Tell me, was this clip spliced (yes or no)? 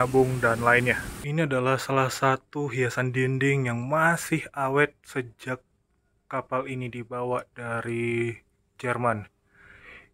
yes